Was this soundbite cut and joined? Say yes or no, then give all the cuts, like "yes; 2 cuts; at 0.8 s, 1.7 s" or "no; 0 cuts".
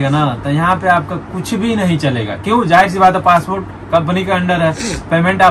no; 0 cuts